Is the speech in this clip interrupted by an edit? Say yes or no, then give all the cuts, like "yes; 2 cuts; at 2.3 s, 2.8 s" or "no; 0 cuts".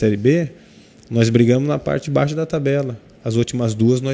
no; 0 cuts